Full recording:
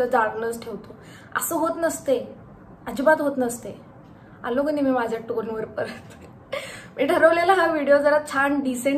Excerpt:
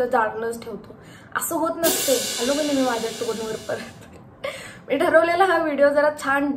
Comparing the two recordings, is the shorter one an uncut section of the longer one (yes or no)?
no